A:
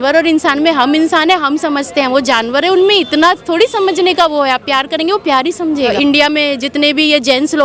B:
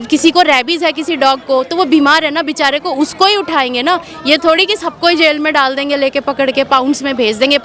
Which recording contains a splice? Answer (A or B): A